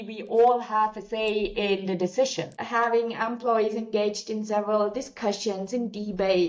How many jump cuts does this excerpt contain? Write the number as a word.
one